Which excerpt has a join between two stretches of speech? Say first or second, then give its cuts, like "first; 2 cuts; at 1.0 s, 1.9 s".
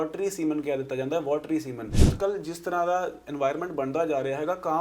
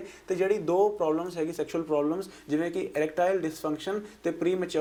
first; 1 cut; at 2.1 s